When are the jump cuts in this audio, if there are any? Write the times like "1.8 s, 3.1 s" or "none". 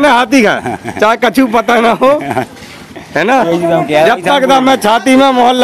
none